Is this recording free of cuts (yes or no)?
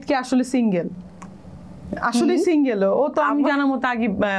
yes